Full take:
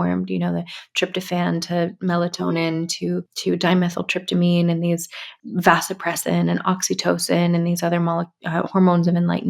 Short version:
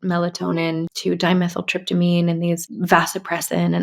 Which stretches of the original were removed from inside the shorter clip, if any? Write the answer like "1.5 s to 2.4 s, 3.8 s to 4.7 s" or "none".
2.9 s to 3.3 s, 5.1 s to 5.4 s